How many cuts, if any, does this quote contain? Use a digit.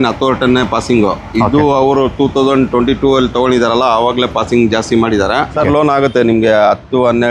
1